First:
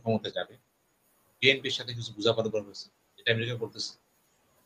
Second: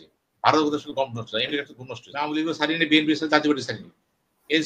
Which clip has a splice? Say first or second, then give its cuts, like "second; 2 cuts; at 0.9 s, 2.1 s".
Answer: second; 1 cut; at 2.3 s